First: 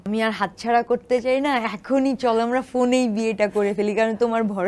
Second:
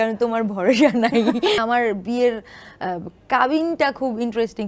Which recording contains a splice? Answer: second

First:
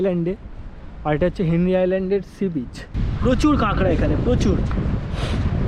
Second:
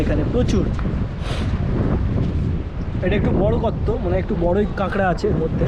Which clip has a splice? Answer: first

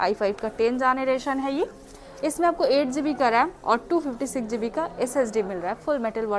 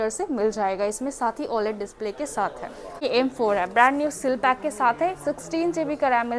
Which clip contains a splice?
second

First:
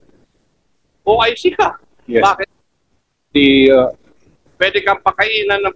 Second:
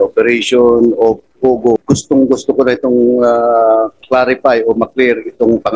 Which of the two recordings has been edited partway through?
second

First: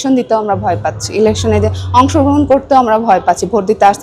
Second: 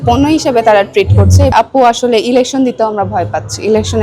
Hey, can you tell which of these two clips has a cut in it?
second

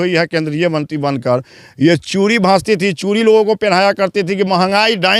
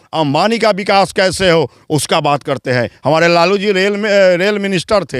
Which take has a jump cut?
second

